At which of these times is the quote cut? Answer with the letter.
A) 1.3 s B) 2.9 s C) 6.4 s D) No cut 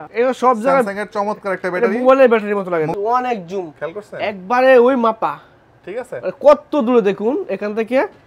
B